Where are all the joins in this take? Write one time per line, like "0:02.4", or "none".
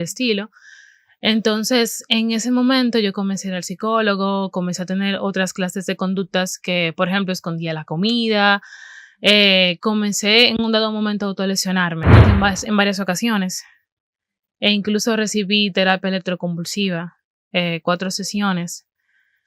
0:12.2